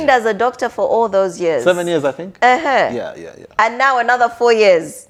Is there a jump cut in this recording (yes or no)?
no